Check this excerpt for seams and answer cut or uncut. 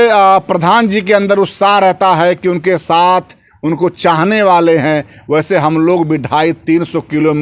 uncut